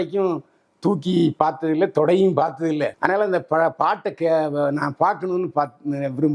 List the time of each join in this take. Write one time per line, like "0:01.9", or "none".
none